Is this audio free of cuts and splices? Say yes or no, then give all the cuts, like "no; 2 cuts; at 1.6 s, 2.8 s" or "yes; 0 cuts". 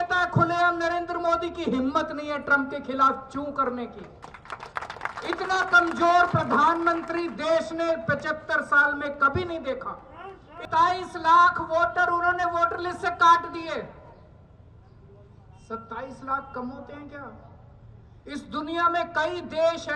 no; 1 cut; at 10.6 s